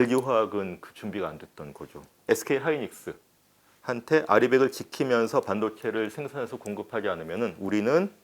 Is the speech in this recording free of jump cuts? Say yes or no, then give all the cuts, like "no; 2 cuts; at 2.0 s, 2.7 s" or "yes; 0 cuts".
no; 1 cut; at 2.2 s